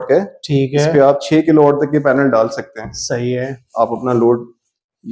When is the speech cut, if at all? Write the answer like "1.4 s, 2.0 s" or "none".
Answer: none

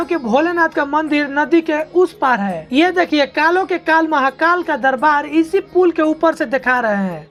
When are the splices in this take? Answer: none

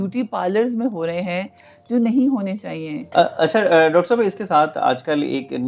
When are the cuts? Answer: 3.0 s

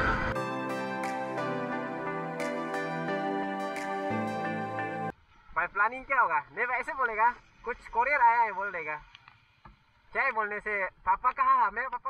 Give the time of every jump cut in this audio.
5.1 s

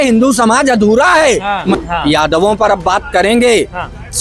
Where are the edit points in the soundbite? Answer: 1.7 s

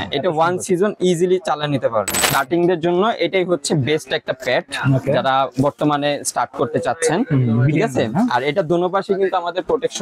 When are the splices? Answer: 2.2 s

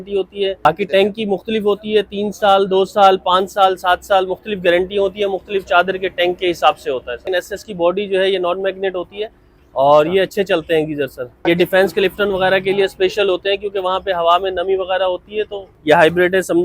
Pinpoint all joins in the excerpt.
0.7 s, 7.2 s, 11.4 s, 15.7 s

